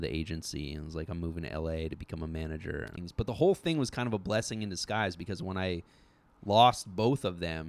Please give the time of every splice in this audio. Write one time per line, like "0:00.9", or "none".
0:02.9